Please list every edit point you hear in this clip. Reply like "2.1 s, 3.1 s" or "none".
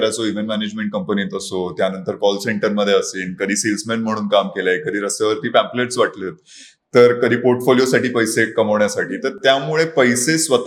none